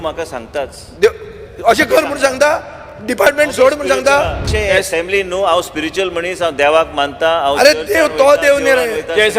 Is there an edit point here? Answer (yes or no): yes